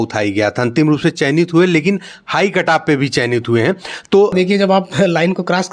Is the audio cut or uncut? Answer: cut